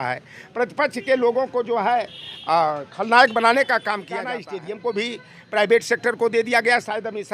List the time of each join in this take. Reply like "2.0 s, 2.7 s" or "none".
4.1 s